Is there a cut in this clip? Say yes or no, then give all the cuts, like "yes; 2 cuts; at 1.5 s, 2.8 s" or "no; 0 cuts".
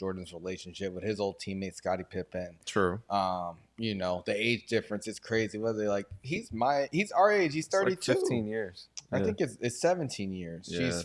no; 0 cuts